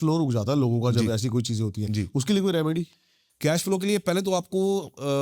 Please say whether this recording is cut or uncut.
uncut